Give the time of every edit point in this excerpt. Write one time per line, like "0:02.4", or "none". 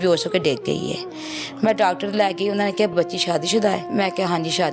0:02.9
0:03.9